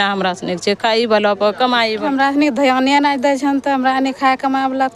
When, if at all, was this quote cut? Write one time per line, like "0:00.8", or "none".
0:02.1